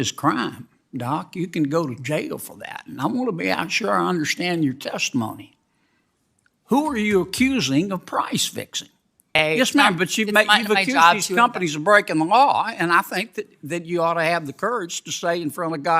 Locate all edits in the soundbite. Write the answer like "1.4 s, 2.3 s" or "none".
9.4 s